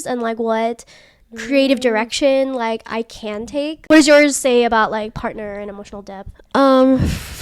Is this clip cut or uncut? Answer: cut